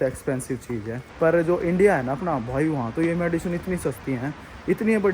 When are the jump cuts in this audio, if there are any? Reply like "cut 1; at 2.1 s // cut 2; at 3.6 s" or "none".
cut 1; at 1.0 s